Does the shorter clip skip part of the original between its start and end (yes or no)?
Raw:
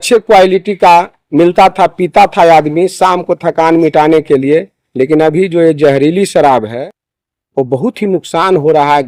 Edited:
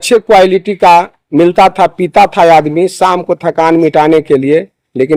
no